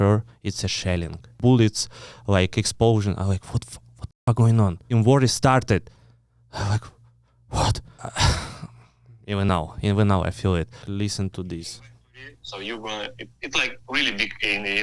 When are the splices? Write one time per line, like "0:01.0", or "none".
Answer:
0:01.3
0:04.9
0:08.0
0:10.8